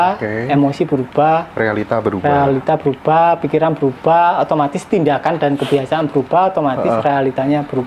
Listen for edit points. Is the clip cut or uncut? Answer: uncut